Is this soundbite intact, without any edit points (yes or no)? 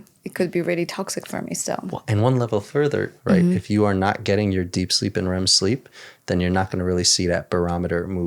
no